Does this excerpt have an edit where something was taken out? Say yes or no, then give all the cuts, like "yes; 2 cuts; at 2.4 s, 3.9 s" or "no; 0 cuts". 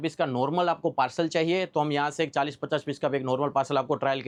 no; 0 cuts